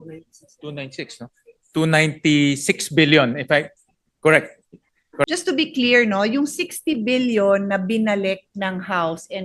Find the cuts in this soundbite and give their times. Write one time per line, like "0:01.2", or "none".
0:05.3